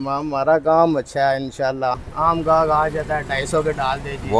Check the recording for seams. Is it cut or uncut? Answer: cut